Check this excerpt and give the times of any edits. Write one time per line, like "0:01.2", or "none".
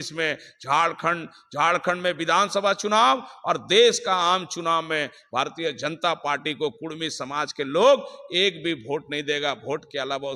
none